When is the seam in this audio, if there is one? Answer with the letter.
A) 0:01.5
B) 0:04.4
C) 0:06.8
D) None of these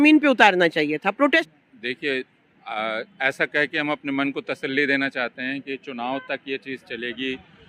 A